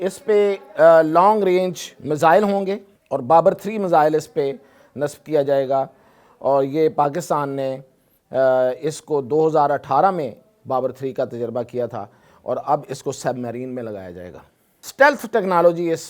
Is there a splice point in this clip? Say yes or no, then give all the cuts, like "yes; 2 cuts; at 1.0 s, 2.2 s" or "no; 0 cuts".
yes; 2 cuts; at 2.9 s, 14.8 s